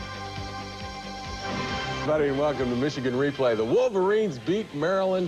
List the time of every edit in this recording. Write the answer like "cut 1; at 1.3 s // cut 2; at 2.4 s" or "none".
none